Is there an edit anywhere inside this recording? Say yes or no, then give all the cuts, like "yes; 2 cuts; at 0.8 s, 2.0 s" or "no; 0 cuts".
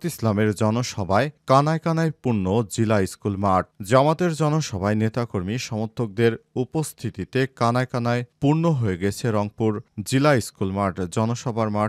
no; 0 cuts